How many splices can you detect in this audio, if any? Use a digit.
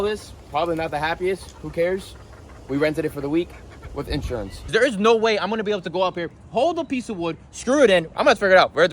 1